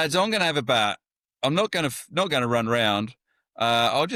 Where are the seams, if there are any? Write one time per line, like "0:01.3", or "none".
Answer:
none